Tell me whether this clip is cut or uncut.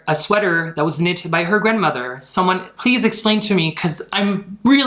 uncut